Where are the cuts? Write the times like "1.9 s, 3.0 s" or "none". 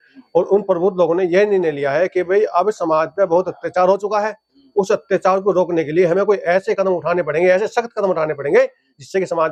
none